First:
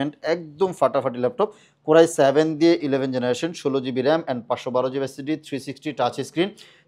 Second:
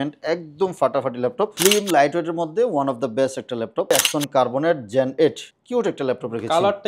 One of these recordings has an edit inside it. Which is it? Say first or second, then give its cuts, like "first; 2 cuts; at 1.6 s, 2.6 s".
second; 3 cuts; at 1.5 s, 3.9 s, 5.5 s